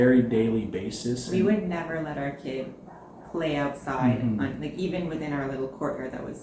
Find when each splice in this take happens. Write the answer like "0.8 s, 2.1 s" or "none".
none